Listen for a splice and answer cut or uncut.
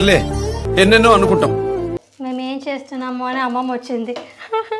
cut